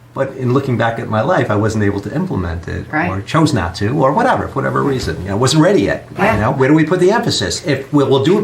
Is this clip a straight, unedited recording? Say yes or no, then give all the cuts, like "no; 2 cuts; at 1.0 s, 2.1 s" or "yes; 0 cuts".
no; 1 cut; at 6.5 s